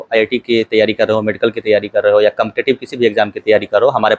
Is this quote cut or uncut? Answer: uncut